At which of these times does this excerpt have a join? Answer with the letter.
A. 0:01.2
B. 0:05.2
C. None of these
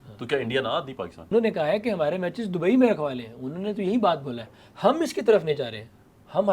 A